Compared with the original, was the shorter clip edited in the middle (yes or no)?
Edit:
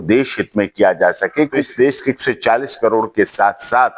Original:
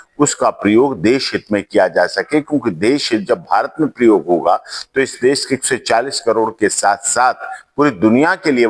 yes